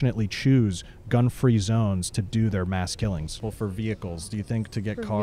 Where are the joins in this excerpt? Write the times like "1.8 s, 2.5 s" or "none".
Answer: 3.4 s

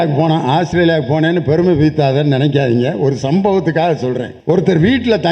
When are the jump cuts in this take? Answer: 4.3 s

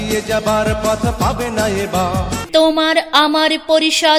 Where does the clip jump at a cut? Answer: 2.4 s

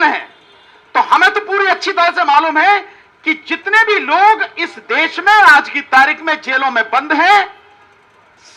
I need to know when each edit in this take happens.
none

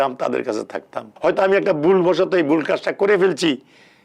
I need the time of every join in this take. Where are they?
1.1 s

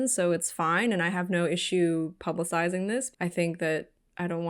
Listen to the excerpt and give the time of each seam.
3.1 s

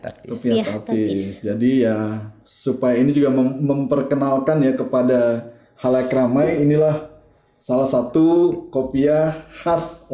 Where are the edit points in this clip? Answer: none

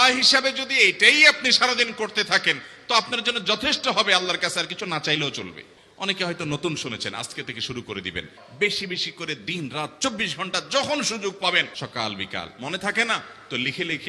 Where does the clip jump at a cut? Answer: 5.7 s, 8.4 s, 11.7 s

